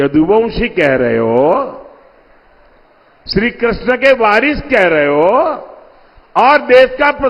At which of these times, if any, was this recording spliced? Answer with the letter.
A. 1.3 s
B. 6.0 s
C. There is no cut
C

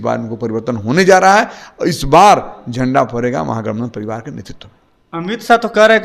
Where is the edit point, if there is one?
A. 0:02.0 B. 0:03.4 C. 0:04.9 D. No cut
D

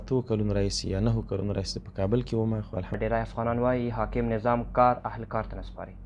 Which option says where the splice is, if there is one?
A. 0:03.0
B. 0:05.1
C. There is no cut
A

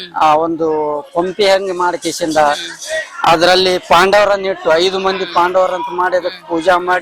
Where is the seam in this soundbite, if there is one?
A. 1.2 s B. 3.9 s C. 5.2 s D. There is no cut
D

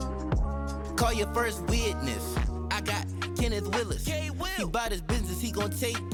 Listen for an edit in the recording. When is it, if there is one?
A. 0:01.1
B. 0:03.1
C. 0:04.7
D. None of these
D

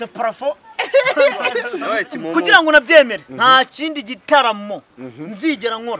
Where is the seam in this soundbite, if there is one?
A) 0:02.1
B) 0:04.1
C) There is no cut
A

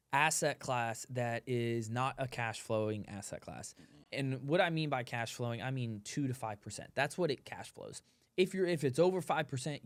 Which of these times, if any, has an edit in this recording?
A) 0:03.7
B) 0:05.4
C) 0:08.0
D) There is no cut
D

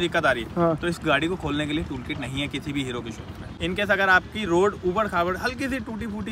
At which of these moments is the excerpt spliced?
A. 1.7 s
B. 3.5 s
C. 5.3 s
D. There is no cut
B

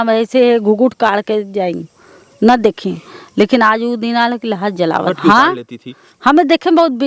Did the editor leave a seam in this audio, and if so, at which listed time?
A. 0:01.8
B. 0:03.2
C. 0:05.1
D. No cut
C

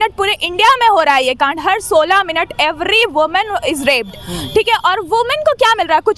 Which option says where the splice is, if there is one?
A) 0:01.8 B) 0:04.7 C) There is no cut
C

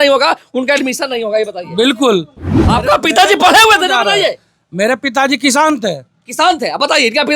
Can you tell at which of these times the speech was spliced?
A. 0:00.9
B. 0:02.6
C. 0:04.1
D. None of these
B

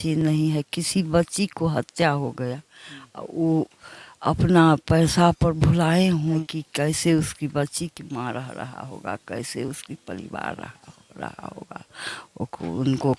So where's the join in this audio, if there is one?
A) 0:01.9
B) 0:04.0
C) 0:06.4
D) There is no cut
C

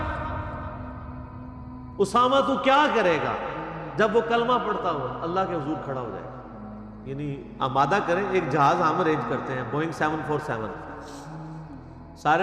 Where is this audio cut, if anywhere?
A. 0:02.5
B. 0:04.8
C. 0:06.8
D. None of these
C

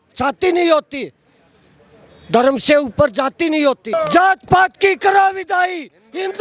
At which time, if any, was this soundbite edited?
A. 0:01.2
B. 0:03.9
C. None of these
B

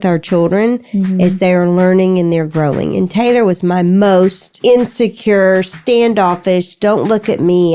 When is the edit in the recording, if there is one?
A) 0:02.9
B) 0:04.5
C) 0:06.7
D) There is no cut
B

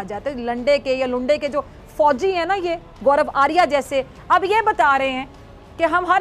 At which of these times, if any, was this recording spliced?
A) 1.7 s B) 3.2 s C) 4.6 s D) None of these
D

